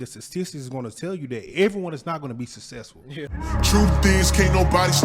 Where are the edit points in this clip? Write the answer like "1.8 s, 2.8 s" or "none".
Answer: 3.3 s